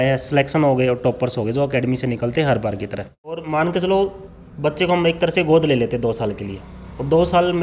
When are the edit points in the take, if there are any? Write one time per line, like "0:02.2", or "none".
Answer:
0:03.4